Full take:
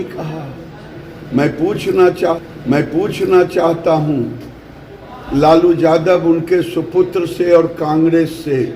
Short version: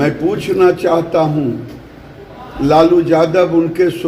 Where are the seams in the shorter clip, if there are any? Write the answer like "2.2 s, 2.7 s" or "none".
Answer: 0.9 s